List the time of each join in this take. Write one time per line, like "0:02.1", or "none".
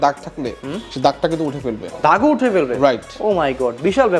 none